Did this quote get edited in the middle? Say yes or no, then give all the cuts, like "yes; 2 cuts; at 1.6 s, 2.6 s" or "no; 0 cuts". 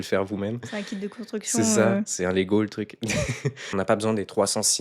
yes; 1 cut; at 3.6 s